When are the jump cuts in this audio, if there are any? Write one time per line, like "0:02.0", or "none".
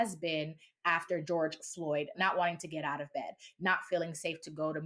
0:01.2
0:02.1